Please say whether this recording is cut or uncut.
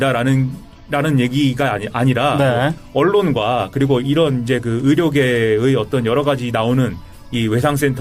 cut